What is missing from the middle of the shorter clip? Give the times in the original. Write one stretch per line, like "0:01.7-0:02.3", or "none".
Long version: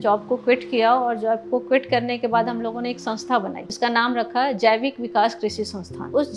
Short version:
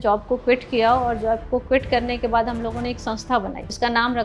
none